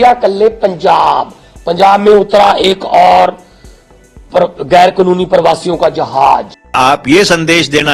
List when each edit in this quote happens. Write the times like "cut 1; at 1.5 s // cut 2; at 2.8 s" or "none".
cut 1; at 6.8 s